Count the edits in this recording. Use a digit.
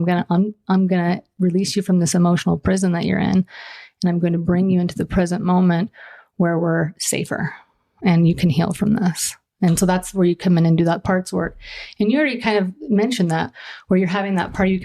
0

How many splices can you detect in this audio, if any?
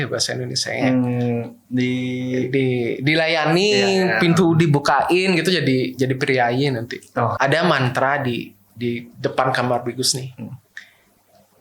1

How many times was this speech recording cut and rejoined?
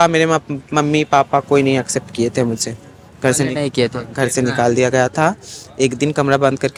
0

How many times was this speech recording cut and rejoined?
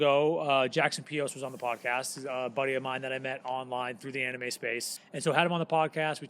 1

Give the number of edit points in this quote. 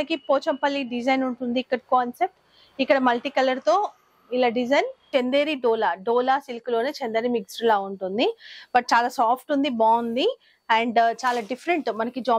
1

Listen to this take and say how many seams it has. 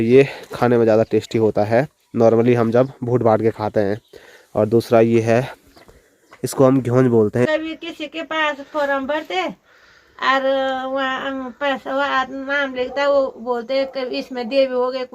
1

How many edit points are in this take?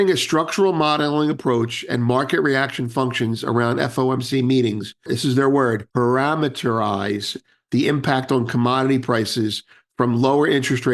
2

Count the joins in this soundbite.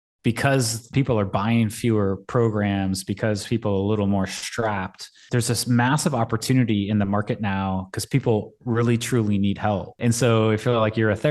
3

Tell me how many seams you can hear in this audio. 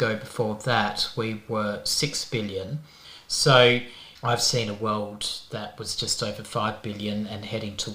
0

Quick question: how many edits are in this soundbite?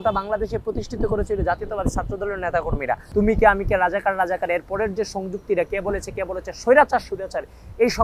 1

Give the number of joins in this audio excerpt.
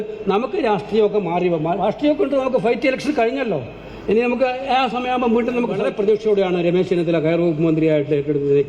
1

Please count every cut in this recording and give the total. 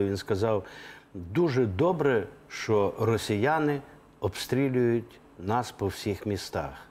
0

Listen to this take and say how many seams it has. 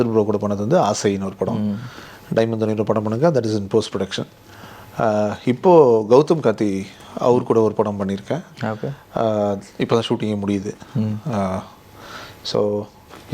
0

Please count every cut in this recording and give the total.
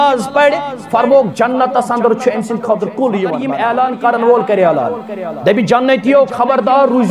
1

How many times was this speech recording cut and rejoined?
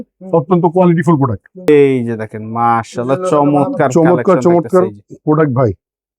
1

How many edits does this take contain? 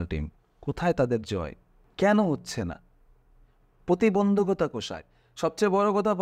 0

